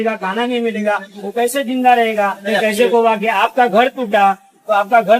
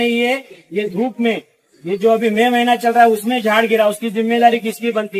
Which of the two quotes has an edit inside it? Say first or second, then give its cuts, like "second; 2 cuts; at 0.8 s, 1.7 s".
first; 1 cut; at 2.4 s